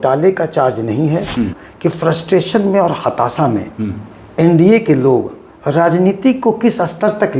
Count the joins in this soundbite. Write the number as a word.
one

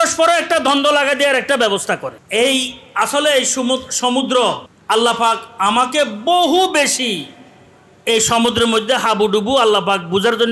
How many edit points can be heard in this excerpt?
two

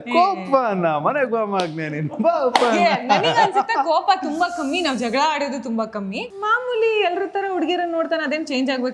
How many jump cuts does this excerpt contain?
one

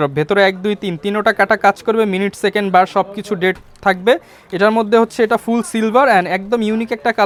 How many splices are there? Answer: zero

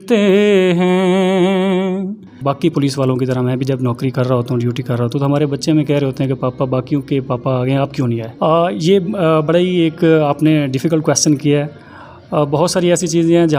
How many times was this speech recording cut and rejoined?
two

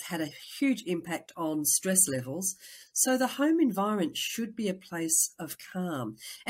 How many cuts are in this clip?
zero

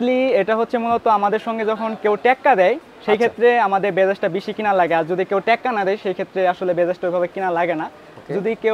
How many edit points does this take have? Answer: zero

